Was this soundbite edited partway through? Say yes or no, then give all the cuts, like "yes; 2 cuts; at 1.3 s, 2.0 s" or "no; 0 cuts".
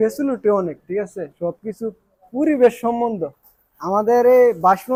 no; 0 cuts